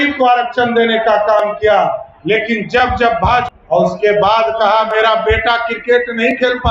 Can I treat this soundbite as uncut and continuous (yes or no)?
no